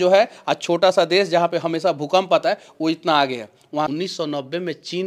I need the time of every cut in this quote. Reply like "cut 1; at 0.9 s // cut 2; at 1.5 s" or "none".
cut 1; at 3.9 s